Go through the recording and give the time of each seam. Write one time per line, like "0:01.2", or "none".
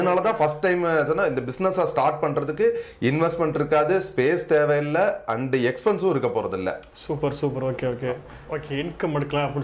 0:08.3